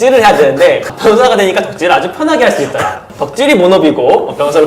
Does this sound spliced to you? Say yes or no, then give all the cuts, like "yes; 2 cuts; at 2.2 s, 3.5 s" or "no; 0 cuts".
yes; 2 cuts; at 0.9 s, 3.1 s